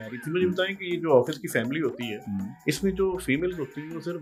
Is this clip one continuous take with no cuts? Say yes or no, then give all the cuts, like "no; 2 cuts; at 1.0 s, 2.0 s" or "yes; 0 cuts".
yes; 0 cuts